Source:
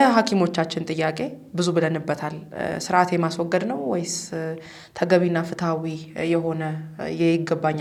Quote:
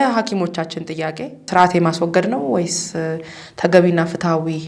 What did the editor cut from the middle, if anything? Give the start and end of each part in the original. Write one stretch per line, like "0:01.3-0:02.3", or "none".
0:01.4-0:02.8